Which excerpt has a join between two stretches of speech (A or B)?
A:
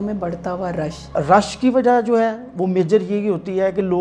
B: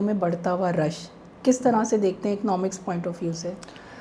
A